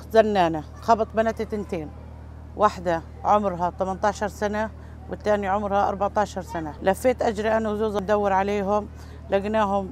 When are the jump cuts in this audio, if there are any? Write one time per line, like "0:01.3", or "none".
0:06.7
0:08.0